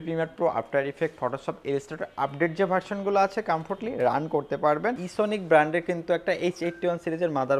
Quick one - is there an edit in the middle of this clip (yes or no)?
yes